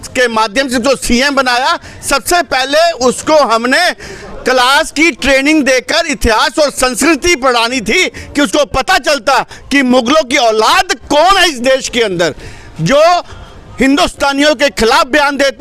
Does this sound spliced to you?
no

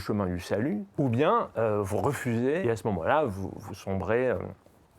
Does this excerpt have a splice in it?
yes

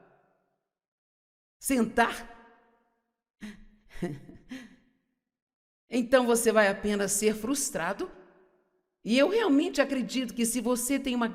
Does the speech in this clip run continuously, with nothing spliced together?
yes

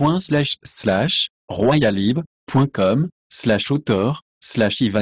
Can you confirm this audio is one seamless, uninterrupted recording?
no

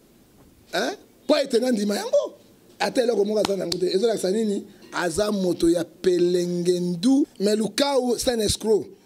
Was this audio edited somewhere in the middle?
yes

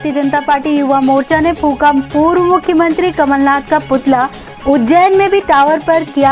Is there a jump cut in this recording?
no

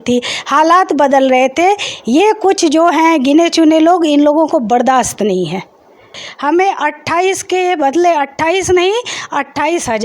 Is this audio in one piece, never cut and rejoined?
no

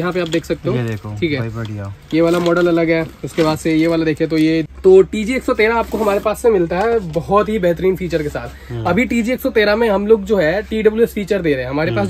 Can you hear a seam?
yes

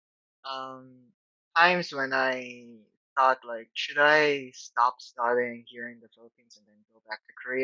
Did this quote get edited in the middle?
no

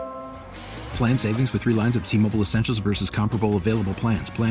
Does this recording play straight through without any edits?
yes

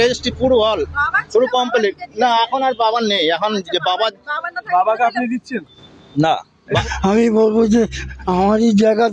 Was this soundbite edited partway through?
yes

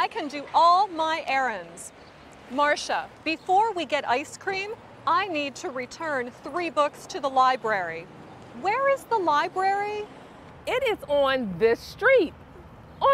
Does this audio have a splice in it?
no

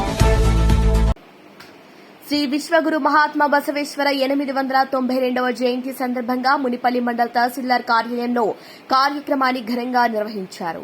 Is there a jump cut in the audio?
yes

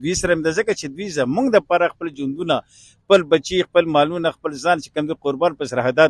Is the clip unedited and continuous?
yes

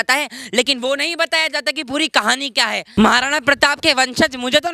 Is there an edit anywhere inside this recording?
yes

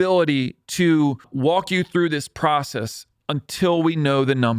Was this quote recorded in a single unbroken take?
no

